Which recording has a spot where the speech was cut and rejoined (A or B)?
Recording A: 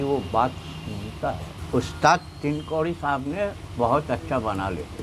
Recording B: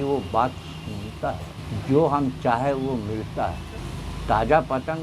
A